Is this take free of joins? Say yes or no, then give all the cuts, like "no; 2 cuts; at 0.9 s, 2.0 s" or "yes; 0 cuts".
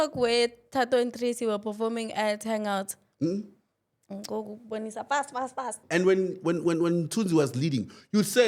no; 1 cut; at 5.8 s